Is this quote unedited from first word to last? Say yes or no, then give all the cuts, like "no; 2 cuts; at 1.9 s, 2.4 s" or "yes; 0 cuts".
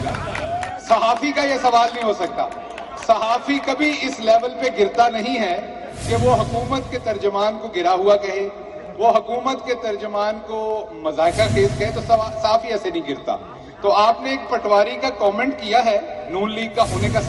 no; 1 cut; at 15.0 s